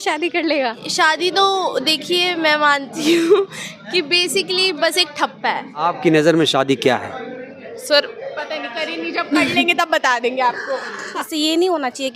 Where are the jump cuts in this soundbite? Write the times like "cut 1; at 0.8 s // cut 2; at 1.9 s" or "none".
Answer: cut 1; at 0.8 s // cut 2; at 5.8 s // cut 3; at 11.3 s